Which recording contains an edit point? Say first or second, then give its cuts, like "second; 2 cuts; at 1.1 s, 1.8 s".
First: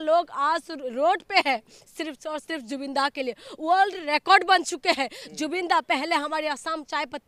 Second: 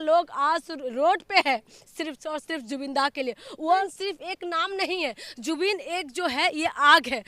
second; 1 cut; at 3.8 s